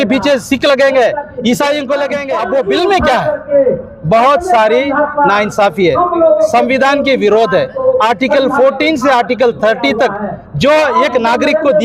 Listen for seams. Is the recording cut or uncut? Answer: cut